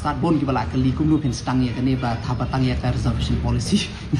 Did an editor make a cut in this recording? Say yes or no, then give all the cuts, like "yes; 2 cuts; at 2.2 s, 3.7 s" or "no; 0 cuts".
no; 0 cuts